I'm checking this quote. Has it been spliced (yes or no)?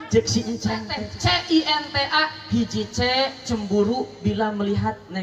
yes